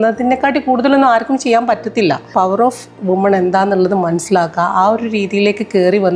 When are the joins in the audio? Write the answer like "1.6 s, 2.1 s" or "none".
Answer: 2.3 s